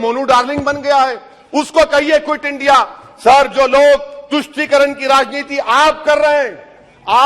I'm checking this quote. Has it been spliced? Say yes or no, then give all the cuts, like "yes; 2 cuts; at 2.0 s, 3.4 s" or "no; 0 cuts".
no; 0 cuts